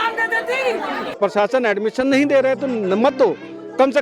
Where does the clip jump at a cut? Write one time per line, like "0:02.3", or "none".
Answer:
0:01.2

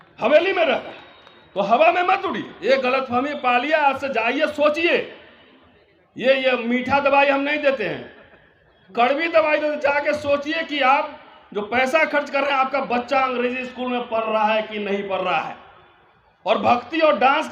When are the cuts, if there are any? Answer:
0:02.5

